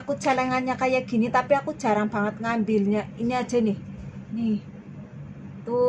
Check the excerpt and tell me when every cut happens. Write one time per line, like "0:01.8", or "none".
none